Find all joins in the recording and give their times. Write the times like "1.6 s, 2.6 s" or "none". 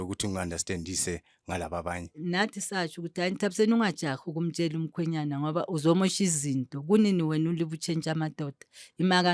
2.2 s

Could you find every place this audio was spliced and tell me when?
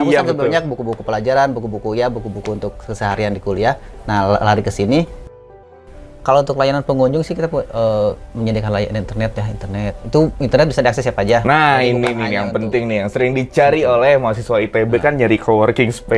5.6 s

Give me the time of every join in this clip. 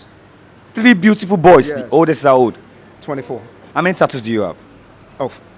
3.6 s

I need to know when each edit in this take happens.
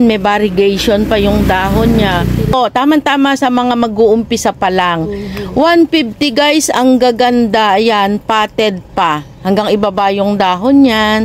2.5 s

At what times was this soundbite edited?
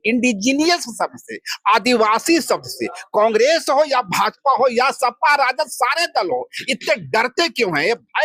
none

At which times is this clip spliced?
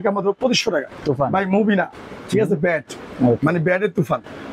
0.9 s

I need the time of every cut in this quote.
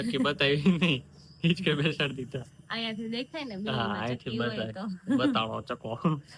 none

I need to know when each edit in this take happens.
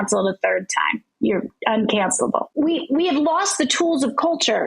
1.0 s, 2.5 s

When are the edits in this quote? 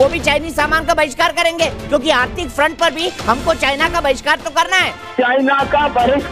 5.0 s

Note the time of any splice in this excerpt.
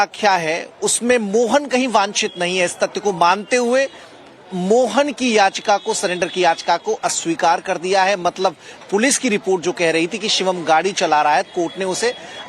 3.0 s

